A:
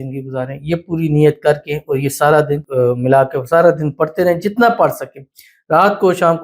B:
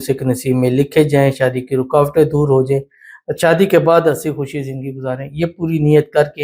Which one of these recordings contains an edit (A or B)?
A